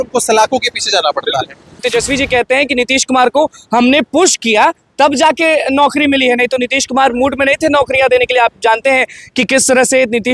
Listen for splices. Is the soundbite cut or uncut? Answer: cut